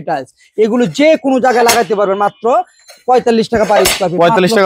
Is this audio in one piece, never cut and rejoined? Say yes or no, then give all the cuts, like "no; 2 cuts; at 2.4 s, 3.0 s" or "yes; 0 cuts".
yes; 0 cuts